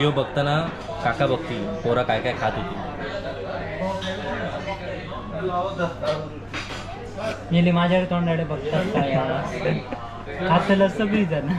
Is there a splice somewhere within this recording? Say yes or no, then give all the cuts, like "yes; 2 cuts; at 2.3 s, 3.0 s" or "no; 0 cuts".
no; 0 cuts